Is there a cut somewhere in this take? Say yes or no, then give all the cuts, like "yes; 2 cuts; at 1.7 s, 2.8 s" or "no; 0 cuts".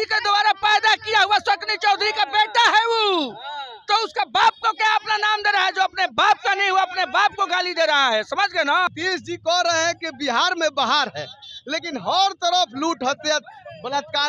yes; 1 cut; at 8.9 s